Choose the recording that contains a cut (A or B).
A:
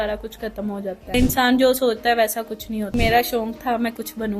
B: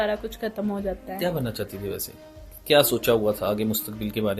A